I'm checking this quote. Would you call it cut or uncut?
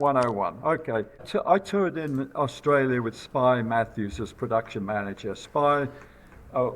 cut